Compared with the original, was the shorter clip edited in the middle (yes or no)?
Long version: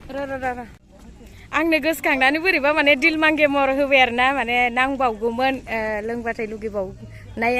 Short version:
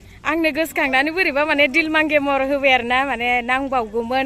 no